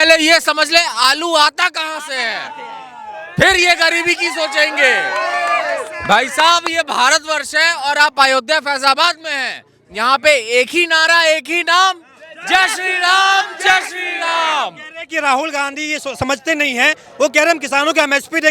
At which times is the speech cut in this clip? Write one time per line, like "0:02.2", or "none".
none